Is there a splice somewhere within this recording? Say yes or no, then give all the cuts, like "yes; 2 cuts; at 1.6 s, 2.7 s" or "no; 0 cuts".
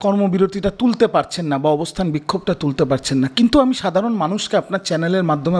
no; 0 cuts